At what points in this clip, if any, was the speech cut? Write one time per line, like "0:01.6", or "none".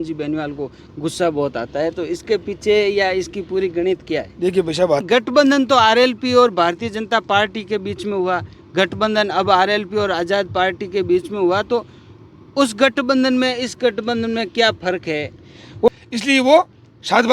0:05.0
0:15.9